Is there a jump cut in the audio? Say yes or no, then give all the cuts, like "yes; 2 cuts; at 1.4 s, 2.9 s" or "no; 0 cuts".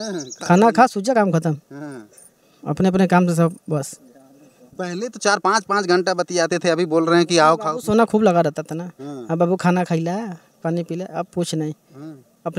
no; 0 cuts